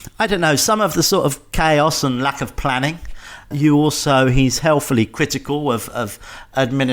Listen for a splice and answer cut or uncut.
cut